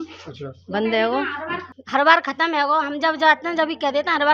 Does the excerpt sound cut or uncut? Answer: cut